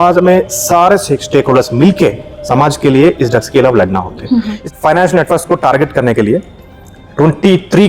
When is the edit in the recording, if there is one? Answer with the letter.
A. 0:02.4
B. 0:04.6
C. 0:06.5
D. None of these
B